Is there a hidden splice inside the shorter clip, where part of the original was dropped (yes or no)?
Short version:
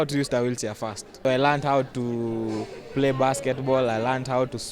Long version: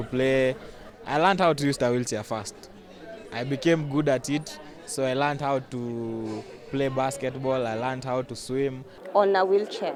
yes